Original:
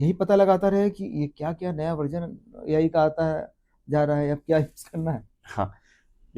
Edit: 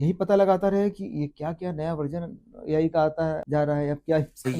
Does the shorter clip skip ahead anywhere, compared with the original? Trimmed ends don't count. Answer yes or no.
yes